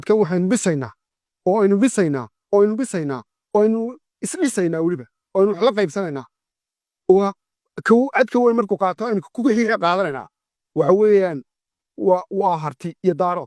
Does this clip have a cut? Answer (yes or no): no